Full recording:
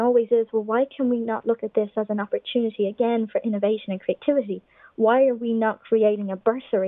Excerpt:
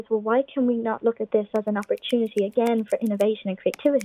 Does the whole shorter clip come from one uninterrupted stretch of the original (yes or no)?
yes